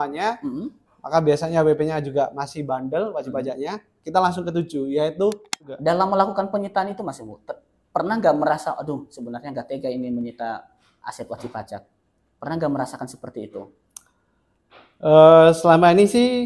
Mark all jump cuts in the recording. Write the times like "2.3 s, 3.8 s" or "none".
5.7 s